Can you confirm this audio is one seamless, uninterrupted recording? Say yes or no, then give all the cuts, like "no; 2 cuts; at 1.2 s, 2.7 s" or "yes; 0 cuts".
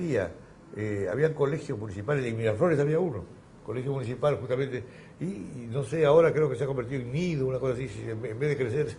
no; 1 cut; at 6.3 s